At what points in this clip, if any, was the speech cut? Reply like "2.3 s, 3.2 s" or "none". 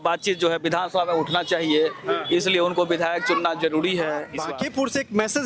4.4 s